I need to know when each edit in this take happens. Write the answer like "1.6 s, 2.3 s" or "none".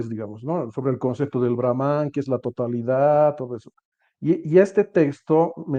none